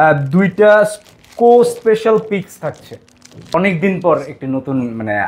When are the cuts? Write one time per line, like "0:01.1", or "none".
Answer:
0:03.5